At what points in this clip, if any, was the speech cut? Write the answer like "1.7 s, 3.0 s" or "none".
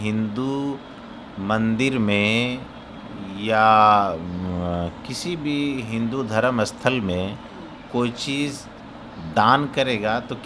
none